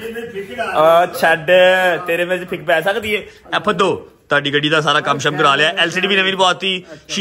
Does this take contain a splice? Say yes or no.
no